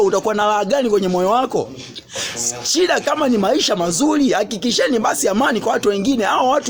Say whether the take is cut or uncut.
uncut